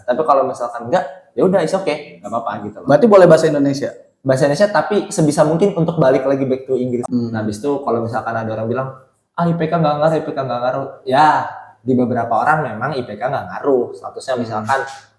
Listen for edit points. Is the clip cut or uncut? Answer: cut